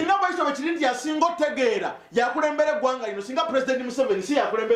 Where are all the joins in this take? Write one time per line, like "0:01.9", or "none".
none